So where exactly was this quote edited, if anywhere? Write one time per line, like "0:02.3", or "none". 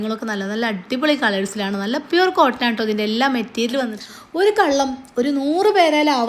0:04.0